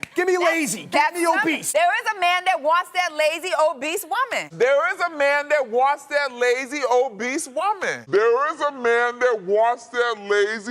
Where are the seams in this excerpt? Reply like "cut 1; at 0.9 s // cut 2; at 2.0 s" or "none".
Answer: cut 1; at 1.6 s // cut 2; at 4.4 s // cut 3; at 7.9 s